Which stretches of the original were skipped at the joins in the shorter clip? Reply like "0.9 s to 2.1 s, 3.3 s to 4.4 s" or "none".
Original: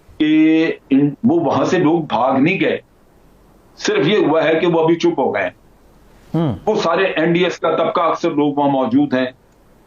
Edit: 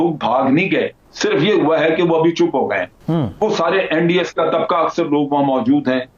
2.9 s to 3.7 s, 5.6 s to 6.2 s